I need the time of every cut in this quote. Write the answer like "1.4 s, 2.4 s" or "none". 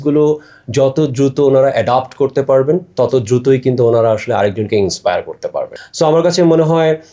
5.7 s